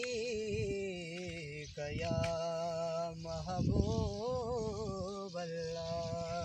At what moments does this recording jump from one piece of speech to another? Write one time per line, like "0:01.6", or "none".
none